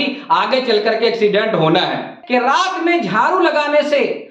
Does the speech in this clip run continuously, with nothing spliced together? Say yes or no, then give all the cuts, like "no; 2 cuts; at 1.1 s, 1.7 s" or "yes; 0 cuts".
no; 1 cut; at 2.2 s